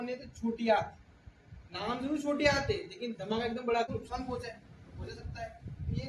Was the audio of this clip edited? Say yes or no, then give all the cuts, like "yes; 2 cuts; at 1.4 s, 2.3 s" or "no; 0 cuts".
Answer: yes; 1 cut; at 3.9 s